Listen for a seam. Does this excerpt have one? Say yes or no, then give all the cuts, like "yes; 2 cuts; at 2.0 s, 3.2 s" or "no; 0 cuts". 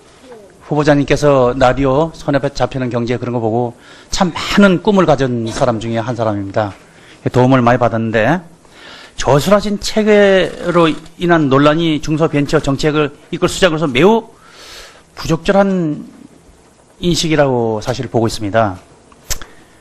no; 0 cuts